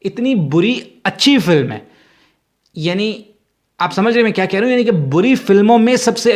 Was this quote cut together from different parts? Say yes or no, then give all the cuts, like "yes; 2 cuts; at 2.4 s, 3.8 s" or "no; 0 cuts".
no; 0 cuts